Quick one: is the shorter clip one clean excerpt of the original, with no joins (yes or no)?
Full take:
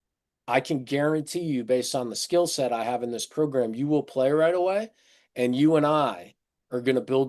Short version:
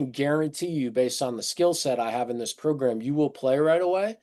yes